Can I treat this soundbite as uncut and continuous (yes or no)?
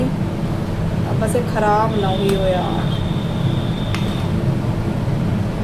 yes